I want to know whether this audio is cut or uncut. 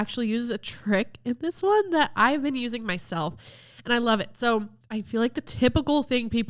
cut